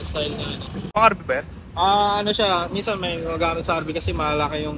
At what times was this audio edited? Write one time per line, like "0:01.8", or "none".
0:00.9